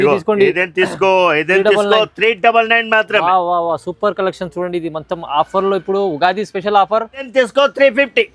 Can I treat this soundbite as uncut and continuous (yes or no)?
no